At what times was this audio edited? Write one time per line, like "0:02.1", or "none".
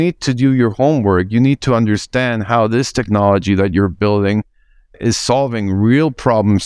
0:05.0

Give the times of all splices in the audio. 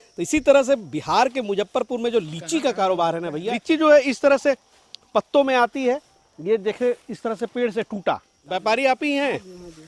0:03.6
0:08.3

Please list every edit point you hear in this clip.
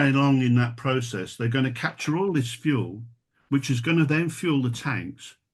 none

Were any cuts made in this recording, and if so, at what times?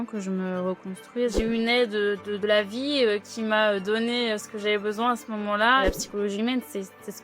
0:01.3
0:05.8

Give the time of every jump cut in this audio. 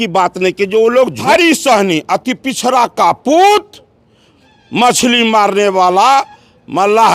0:01.3

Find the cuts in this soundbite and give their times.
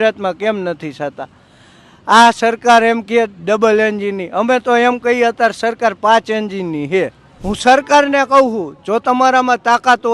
0:07.3

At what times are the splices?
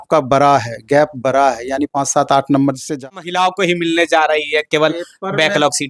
0:03.0

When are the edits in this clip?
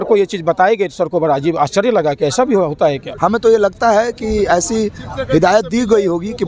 0:03.1

